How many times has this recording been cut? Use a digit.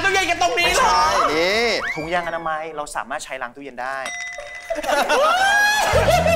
1